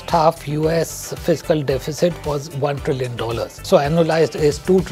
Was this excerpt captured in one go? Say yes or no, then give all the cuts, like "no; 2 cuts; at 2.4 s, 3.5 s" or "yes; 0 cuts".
no; 1 cut; at 3.6 s